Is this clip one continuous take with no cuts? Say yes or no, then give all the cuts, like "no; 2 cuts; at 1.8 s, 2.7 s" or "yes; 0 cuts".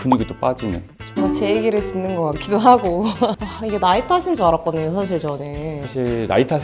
no; 2 cuts; at 0.9 s, 3.5 s